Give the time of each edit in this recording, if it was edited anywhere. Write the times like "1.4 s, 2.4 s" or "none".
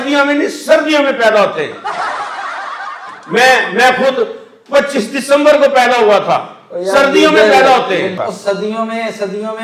none